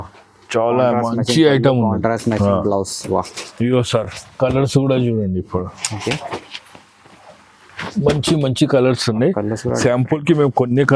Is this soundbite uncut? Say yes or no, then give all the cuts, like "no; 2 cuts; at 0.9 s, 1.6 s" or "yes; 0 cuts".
yes; 0 cuts